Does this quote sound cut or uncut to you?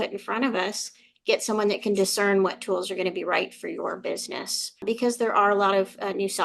cut